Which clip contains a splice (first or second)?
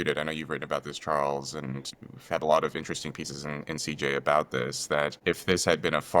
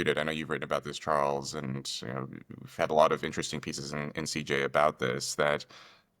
first